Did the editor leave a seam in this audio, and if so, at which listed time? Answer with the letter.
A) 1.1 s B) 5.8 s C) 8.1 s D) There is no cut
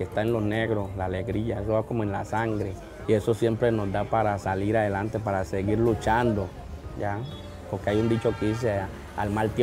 D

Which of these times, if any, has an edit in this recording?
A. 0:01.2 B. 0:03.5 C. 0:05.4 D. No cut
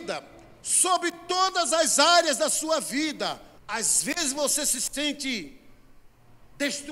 B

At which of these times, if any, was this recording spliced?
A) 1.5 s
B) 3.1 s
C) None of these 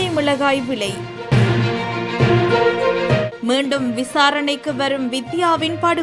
C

